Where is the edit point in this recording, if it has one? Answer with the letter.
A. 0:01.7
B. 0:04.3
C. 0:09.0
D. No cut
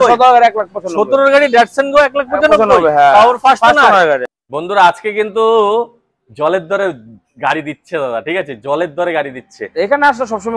B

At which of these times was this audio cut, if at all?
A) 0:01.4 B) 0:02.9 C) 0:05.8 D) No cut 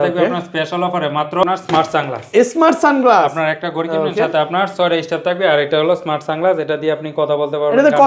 A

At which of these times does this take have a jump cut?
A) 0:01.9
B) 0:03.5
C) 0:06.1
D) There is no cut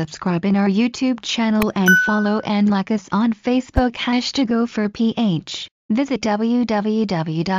C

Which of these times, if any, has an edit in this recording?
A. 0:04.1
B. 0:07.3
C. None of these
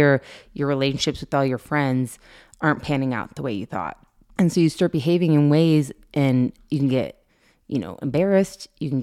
C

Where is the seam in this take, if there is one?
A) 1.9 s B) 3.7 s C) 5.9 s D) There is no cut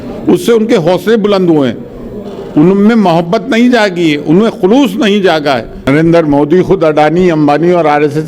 C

